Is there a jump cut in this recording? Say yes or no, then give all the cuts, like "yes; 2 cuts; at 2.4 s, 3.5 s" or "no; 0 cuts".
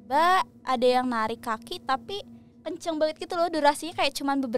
no; 0 cuts